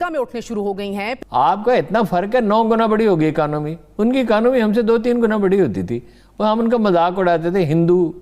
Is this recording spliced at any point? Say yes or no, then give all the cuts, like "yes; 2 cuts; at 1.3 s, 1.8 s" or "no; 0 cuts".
yes; 1 cut; at 1.1 s